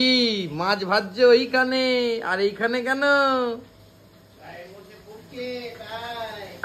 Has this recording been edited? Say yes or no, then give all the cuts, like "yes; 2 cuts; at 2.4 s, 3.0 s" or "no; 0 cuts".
no; 0 cuts